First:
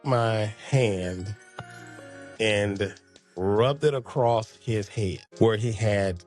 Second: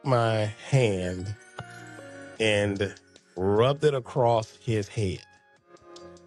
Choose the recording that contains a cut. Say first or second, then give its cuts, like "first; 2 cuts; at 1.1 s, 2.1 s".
first; 1 cut; at 5.2 s